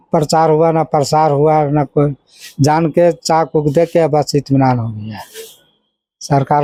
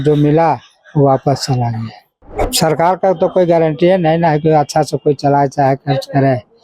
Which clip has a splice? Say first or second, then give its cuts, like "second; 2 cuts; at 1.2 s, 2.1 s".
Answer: second; 1 cut; at 2.4 s